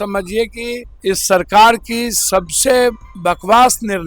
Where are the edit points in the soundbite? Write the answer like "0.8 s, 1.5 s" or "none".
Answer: 0.9 s, 3.1 s